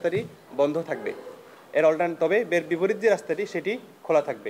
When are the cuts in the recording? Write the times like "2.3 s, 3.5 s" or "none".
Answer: none